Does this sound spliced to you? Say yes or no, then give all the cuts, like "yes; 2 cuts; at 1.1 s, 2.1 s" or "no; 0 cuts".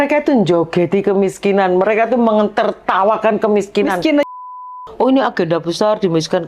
yes; 1 cut; at 4.3 s